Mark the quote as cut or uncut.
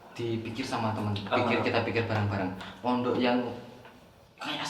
uncut